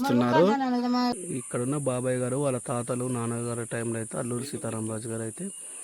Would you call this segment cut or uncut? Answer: cut